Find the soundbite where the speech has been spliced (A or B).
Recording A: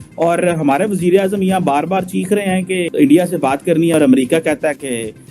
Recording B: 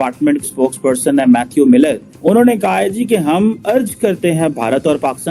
A